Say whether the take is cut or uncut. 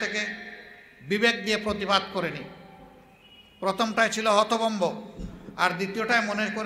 uncut